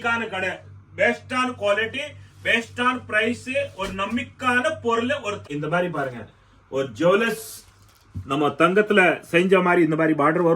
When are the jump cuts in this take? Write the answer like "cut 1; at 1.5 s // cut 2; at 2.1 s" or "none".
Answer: cut 1; at 5.4 s